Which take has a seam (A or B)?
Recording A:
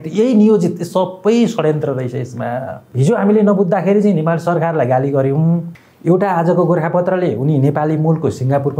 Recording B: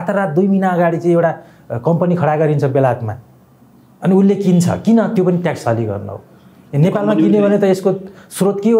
A